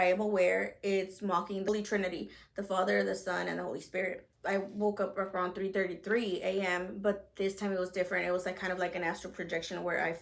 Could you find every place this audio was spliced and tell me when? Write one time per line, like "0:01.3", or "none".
0:01.7
0:04.3